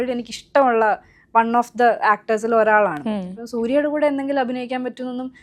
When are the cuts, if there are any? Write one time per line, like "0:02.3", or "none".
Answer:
none